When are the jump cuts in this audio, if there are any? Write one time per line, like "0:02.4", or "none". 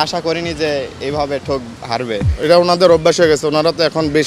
0:02.2